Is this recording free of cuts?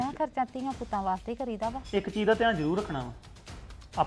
no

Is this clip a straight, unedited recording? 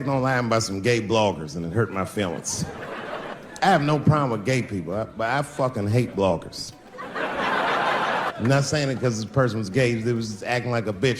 no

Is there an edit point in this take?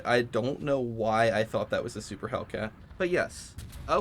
yes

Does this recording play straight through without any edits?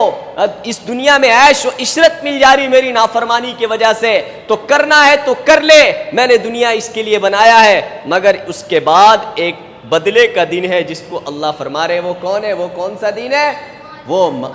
yes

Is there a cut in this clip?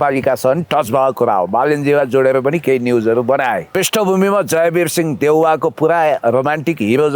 yes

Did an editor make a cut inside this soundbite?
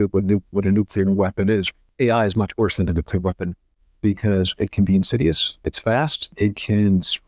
yes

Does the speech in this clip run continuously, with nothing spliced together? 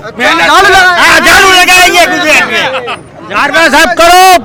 yes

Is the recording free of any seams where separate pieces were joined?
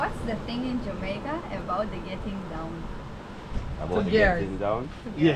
yes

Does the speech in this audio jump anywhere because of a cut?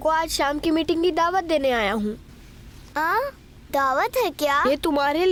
no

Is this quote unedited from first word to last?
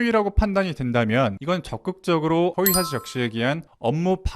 yes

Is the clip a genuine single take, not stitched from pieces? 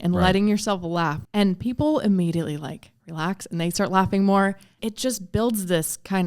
no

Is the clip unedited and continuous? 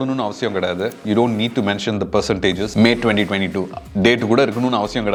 yes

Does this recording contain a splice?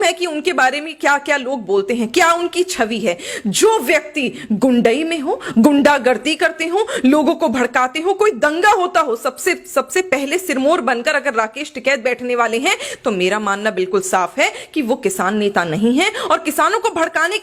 no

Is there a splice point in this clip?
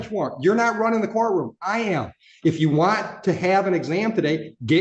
no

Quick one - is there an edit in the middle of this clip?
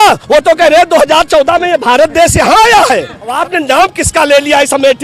yes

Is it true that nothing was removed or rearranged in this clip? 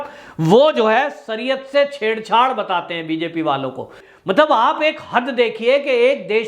no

